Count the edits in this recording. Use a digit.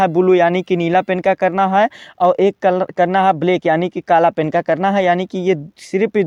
0